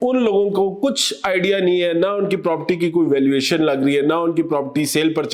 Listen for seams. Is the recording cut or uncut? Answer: uncut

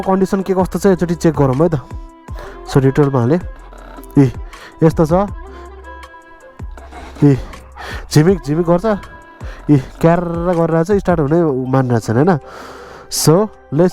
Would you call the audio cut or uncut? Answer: uncut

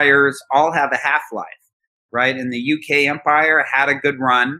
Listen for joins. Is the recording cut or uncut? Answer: uncut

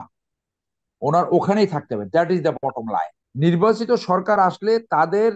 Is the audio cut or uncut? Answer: cut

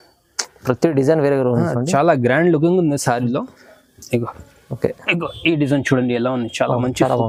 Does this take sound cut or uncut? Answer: uncut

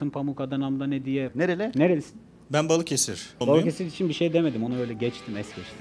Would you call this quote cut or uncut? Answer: cut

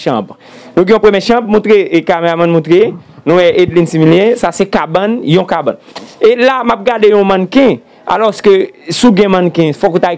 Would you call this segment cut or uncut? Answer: uncut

